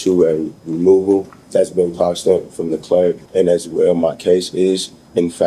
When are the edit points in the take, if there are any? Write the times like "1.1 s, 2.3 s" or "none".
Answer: 1.4 s, 3.2 s